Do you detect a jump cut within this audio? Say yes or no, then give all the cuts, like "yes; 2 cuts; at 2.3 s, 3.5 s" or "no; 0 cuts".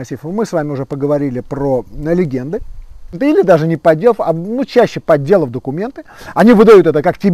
yes; 1 cut; at 3.1 s